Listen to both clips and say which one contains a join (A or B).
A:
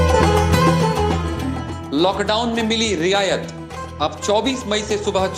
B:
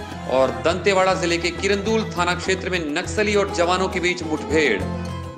A